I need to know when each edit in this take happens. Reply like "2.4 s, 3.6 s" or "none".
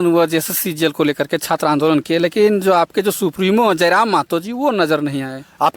none